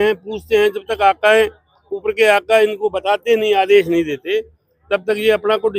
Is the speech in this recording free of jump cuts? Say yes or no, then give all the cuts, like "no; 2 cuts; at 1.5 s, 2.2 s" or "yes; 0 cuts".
yes; 0 cuts